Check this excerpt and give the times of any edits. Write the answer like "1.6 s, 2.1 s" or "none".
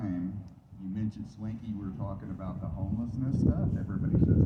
none